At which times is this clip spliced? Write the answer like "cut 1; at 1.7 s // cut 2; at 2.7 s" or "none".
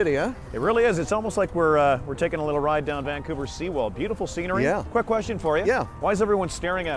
none